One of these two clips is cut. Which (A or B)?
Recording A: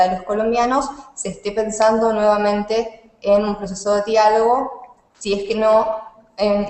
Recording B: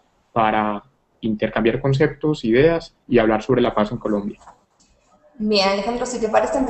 B